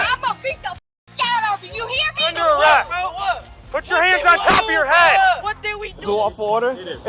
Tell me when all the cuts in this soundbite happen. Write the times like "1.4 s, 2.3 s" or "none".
2.3 s, 5.9 s